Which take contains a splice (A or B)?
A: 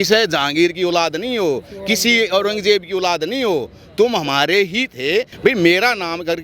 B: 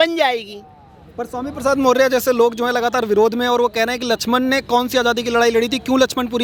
A